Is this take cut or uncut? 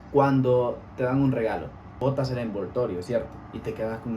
cut